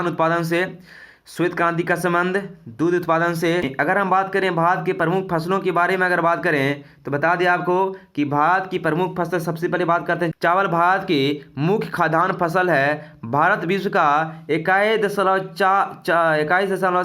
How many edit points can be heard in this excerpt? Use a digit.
2